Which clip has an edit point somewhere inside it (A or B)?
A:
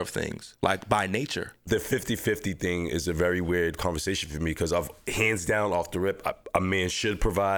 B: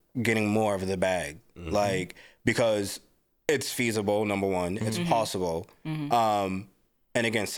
A